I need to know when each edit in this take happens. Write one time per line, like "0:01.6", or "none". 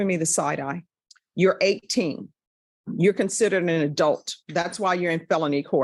0:01.2